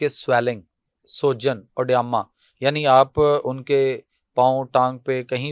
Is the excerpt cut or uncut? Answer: uncut